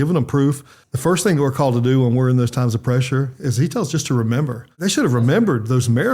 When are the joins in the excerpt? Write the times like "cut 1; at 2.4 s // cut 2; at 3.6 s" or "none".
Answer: cut 1; at 0.8 s // cut 2; at 4.7 s